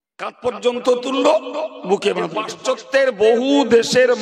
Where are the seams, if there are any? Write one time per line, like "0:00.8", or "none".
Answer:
0:02.5